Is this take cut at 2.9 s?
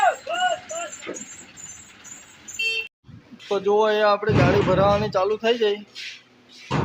yes; 1 cut; at 2.9 s

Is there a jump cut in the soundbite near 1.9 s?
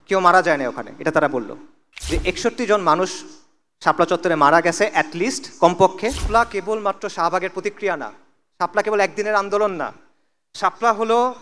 yes; 2 cuts; at 1.9 s, 6.2 s

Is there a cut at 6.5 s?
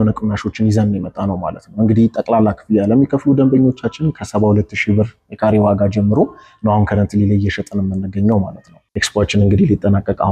no; 1 cut; at 8.8 s

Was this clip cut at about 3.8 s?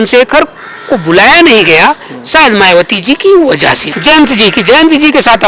yes; 1 cut; at 3.8 s

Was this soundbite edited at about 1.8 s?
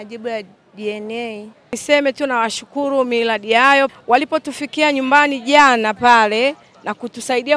yes; 1 cut; at 1.8 s

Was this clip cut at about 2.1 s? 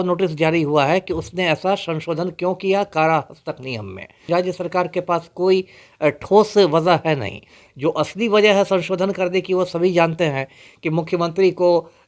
no; 1 cut; at 4.3 s

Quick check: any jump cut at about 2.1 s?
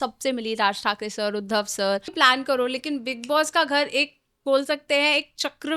yes; 1 cut; at 2.1 s

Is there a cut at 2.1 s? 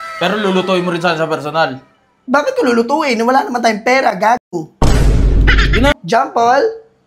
no; 1 cut; at 5.9 s

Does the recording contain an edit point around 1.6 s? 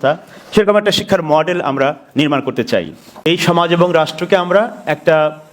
no; 1 cut; at 3.2 s

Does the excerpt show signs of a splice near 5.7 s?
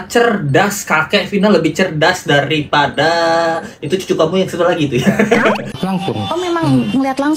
yes; 1 cut; at 5.7 s

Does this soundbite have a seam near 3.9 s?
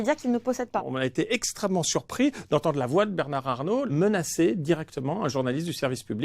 yes; 2 cuts; at 0.9 s, 3.9 s

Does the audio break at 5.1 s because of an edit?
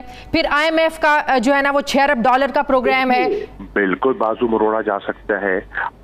no; 1 cut; at 3.6 s

